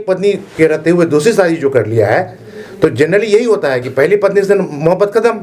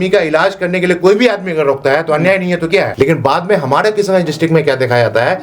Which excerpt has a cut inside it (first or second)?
second